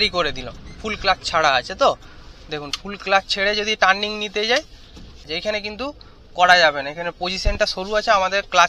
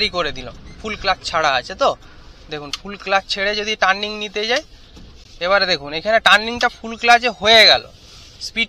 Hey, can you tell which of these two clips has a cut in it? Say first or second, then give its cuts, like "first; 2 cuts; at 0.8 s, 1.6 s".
first; 1 cut; at 5.3 s